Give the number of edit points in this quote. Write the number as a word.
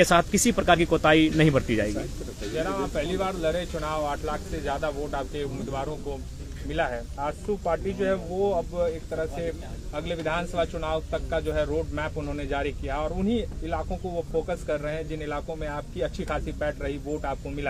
zero